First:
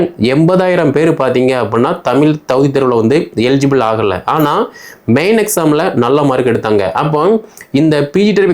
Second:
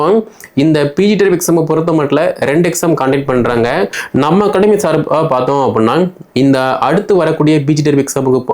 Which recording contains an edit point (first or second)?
second